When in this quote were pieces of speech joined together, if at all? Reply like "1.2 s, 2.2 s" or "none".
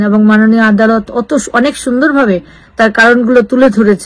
none